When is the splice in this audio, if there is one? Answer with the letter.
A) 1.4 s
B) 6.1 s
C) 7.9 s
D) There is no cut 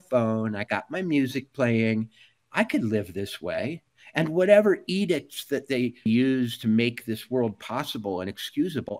B